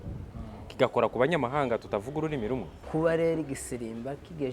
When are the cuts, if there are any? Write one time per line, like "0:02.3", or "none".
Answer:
0:02.8